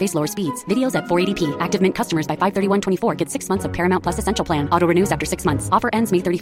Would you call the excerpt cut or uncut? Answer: uncut